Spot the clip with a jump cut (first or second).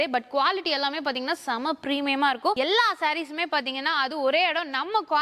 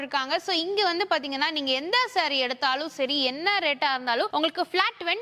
first